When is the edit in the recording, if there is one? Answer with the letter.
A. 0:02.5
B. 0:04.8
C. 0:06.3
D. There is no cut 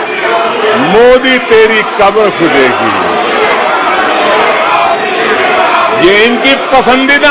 D